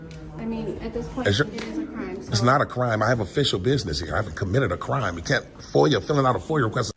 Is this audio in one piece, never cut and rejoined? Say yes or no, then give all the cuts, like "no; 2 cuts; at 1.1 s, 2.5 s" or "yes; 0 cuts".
yes; 0 cuts